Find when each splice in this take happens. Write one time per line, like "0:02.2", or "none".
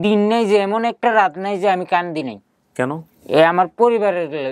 0:03.1